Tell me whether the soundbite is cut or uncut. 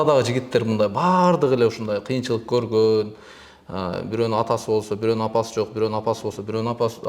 uncut